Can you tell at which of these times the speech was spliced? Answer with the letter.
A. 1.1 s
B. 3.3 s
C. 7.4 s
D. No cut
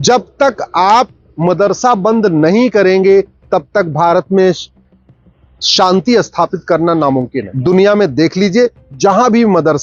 C